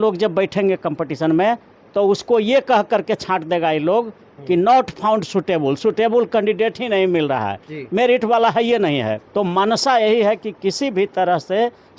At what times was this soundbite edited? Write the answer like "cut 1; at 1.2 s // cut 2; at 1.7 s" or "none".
cut 1; at 9.2 s